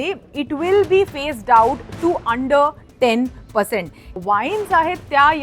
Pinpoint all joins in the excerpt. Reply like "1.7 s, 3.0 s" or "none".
4.1 s